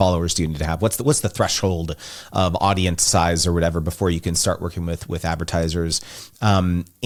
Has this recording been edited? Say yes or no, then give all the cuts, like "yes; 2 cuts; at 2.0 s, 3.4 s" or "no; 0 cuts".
no; 0 cuts